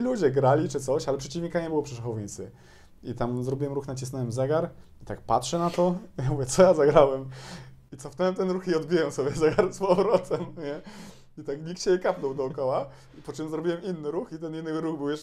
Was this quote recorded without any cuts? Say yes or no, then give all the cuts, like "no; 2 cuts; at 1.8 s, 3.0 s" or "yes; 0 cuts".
yes; 0 cuts